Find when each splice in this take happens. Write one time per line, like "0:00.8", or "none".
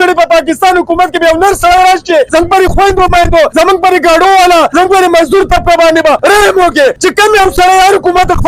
0:02.3
0:03.5
0:04.7
0:06.2
0:07.0